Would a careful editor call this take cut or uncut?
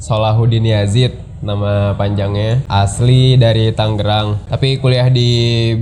cut